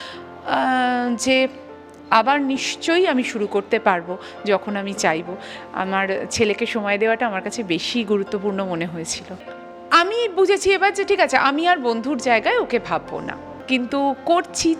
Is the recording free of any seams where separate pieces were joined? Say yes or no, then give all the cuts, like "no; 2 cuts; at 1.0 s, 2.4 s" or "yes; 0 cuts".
no; 2 cuts; at 9.5 s, 13.5 s